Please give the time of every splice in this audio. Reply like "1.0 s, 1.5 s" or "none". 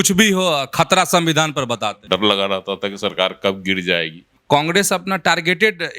2.0 s, 4.3 s